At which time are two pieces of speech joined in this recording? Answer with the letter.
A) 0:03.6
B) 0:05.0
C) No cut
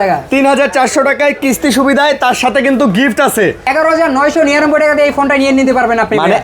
A